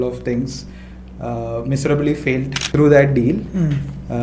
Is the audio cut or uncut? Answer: cut